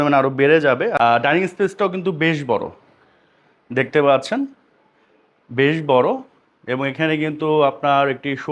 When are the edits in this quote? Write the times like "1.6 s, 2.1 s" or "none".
0.9 s